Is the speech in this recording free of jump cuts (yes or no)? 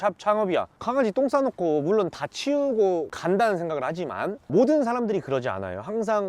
yes